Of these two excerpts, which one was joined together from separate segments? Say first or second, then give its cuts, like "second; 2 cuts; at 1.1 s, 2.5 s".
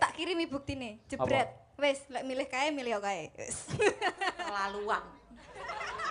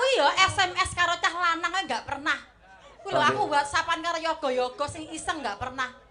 first; 1 cut; at 4.4 s